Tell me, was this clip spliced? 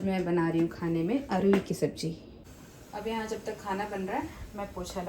yes; 1 cut; at 2.6 s

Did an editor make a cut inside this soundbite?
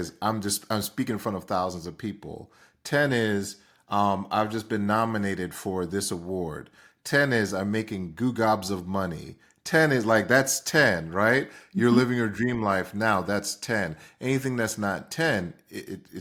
no; 0 cuts

